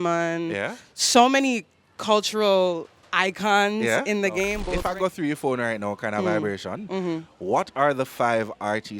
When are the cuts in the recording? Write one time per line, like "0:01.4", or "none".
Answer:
0:04.7

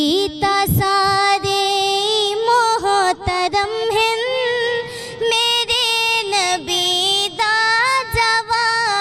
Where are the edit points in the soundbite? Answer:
none

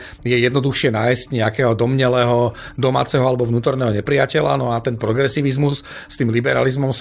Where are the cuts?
none

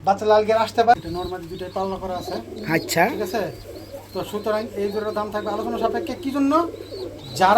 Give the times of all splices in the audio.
0:01.0

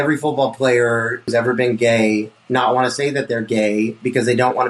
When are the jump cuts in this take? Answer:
0:01.3

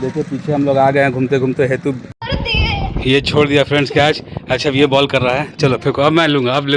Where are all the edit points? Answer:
0:02.1

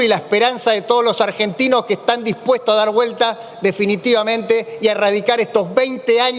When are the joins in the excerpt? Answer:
none

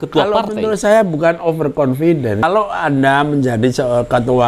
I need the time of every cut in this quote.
0:02.4

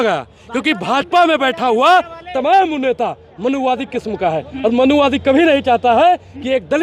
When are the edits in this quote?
none

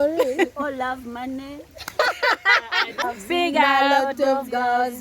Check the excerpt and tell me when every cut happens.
0:03.0

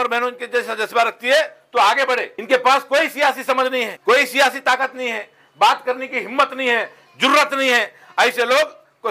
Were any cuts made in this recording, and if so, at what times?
0:02.3
0:03.9

